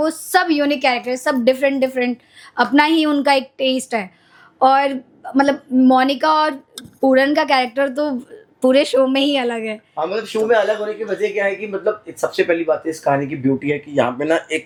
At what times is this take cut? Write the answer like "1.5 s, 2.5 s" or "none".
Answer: none